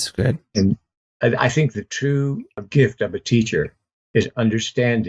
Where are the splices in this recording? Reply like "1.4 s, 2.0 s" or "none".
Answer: 0.9 s, 2.6 s